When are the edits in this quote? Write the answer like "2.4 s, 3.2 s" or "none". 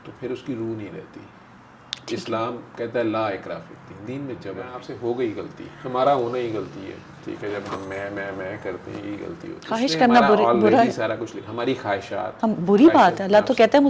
4.8 s, 9.5 s